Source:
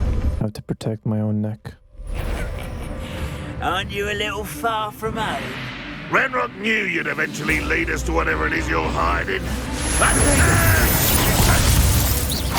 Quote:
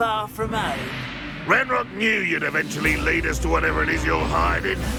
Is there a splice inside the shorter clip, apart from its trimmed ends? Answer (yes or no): no